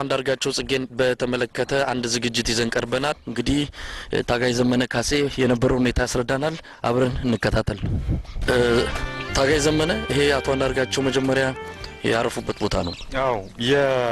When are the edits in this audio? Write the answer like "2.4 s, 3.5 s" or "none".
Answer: 3.2 s, 8.3 s